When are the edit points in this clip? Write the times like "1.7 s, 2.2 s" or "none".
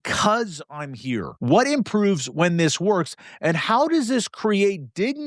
1.3 s